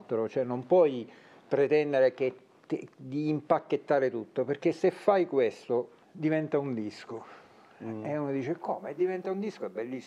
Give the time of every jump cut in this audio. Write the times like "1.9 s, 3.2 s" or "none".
6.0 s